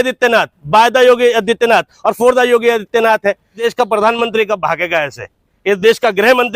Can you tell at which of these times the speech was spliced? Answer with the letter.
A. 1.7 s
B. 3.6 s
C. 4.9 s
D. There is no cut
B